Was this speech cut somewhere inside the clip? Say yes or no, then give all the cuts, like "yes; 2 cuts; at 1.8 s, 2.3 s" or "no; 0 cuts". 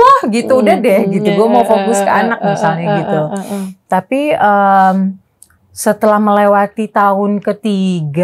no; 0 cuts